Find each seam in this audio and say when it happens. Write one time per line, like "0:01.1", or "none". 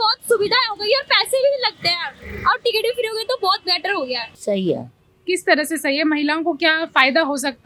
none